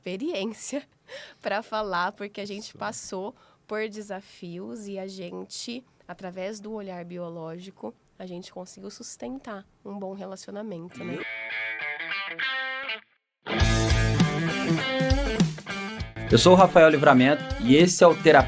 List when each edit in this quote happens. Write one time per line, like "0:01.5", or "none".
0:11.2